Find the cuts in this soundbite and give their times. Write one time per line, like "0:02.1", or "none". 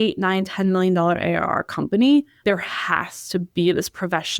0:02.4